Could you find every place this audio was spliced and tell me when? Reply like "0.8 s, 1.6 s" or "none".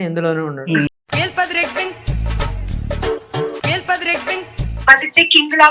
0.9 s, 4.8 s